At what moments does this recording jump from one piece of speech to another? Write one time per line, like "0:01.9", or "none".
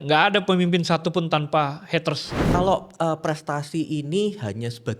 0:02.4